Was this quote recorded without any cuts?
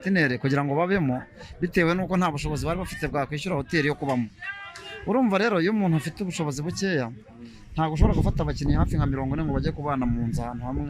yes; 0 cuts

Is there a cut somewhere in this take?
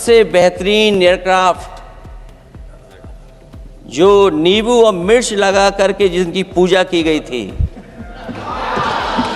no; 0 cuts

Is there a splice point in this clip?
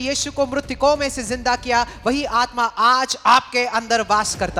no; 0 cuts

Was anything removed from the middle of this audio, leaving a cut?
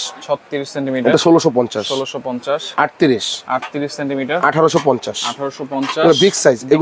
no; 0 cuts

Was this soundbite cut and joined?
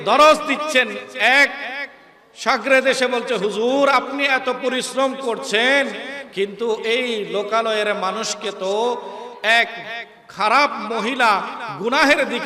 no; 0 cuts

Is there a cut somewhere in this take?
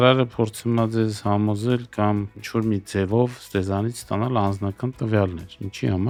no; 0 cuts

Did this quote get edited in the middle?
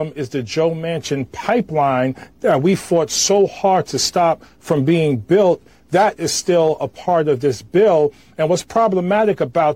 no; 0 cuts

